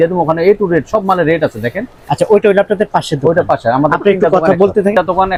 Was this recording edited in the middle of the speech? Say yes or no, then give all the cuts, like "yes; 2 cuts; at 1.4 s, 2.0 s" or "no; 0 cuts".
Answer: no; 0 cuts